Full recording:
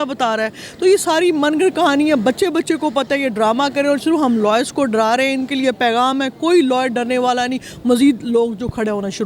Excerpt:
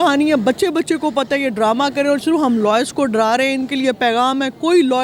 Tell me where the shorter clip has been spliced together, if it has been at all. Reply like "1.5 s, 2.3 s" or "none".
none